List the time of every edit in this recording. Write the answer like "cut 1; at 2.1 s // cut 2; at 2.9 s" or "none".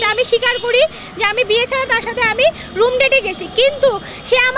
none